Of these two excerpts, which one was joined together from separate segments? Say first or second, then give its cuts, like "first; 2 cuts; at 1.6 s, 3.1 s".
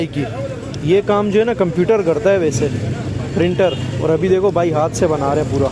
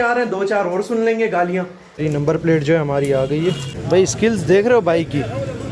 second; 2 cuts; at 1.8 s, 3.7 s